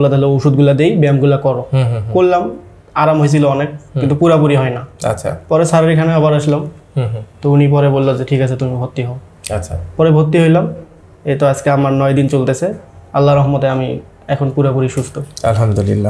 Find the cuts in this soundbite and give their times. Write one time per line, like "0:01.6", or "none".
none